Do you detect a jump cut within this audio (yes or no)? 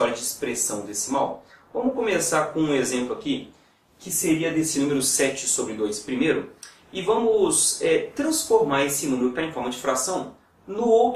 no